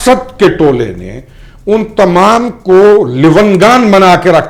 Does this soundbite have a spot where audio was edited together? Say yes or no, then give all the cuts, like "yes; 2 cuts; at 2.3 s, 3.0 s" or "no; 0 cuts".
no; 0 cuts